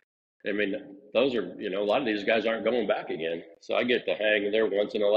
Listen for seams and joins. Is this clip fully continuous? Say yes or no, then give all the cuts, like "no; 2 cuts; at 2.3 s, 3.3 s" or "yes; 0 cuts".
yes; 0 cuts